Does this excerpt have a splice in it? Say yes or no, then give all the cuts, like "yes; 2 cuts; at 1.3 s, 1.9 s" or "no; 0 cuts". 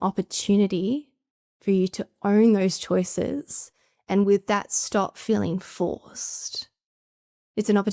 no; 0 cuts